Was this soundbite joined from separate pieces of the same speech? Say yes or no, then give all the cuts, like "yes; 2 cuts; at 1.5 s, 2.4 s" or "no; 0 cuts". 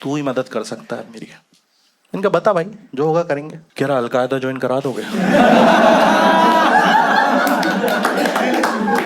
yes; 1 cut; at 3.6 s